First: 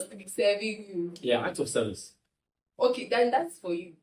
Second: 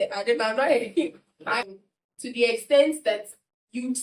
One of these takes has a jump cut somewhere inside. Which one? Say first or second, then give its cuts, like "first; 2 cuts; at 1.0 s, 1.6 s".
second; 1 cut; at 1.5 s